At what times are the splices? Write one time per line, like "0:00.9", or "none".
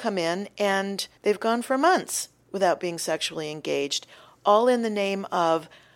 0:01.0